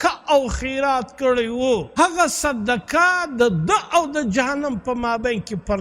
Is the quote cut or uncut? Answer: cut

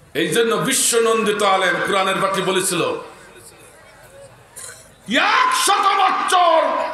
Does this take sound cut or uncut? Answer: uncut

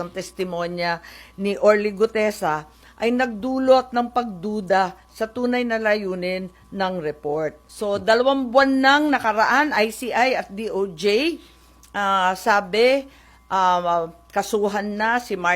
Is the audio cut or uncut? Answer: cut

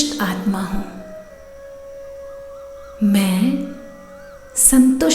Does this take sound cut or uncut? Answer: cut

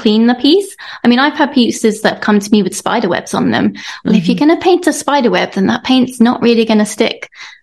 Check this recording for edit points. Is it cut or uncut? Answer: uncut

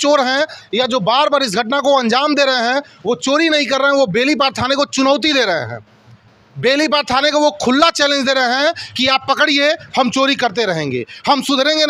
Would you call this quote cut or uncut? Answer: uncut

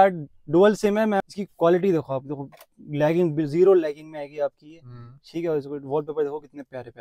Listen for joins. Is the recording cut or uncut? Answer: cut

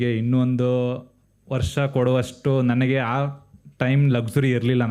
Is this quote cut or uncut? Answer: uncut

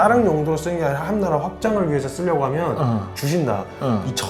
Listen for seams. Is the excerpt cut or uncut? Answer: uncut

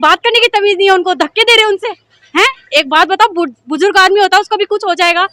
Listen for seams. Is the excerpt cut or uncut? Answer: uncut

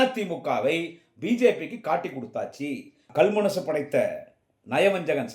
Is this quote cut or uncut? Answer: cut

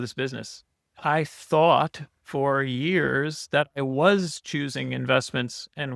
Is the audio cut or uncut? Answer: cut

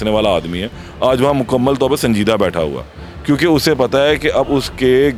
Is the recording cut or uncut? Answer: uncut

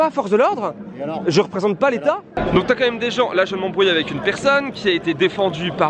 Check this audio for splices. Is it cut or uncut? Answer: uncut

